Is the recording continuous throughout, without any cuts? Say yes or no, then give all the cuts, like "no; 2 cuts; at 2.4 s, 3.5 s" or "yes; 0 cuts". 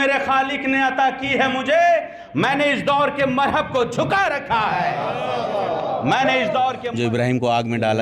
no; 1 cut; at 6.9 s